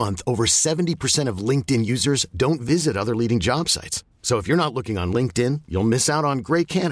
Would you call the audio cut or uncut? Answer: uncut